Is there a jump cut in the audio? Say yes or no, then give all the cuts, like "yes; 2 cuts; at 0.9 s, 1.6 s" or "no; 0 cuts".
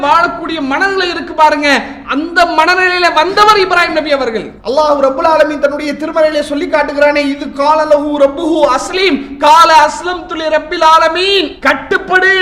yes; 2 cuts; at 4.5 s, 11.5 s